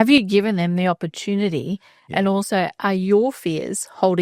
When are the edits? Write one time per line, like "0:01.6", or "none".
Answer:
none